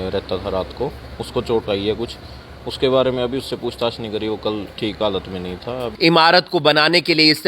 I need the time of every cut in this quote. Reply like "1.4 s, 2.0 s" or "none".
5.9 s